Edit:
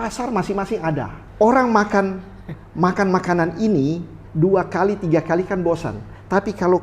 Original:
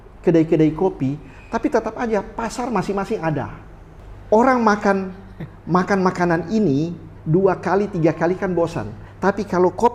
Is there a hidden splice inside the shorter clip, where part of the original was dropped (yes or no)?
yes